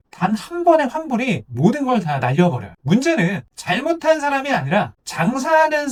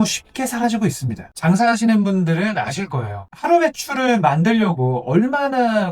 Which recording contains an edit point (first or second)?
second